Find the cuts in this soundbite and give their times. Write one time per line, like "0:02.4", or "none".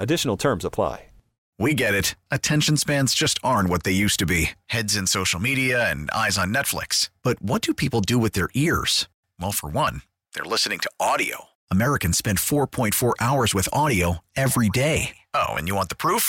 0:01.3